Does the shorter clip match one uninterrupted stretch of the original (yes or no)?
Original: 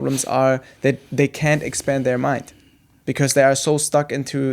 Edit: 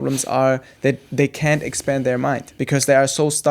no